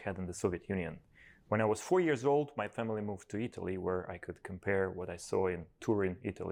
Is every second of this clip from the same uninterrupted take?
yes; 0 cuts

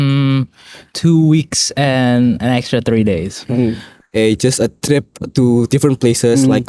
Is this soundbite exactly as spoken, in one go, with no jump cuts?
no; 1 cut; at 3.9 s

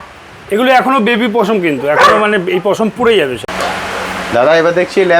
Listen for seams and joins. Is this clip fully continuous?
no; 1 cut; at 3.4 s

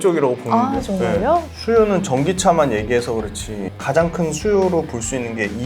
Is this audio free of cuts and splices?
no; 1 cut; at 1.5 s

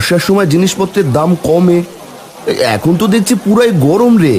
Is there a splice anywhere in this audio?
no; 0 cuts

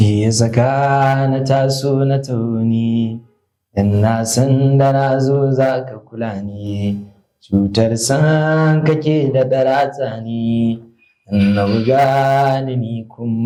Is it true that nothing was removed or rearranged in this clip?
yes; 0 cuts

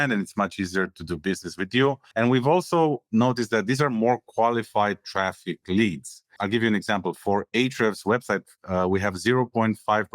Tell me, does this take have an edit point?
yes; 2 cuts; at 2.0 s, 6.4 s

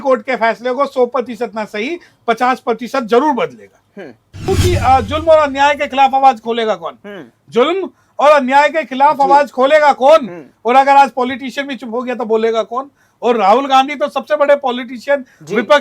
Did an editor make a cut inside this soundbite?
yes; 1 cut; at 4.4 s

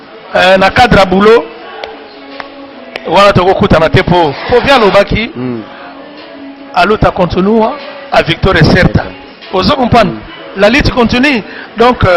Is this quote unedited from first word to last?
no; 1 cut; at 4.5 s

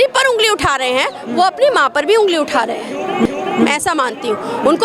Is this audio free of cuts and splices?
yes; 0 cuts

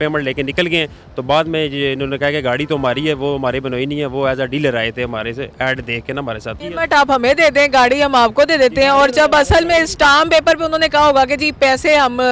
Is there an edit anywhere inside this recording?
yes; 1 cut; at 6.7 s

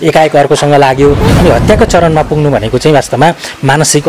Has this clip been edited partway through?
yes; 1 cut; at 1.3 s

